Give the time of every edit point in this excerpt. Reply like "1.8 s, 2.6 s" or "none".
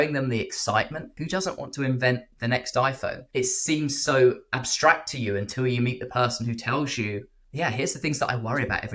1.2 s, 3.2 s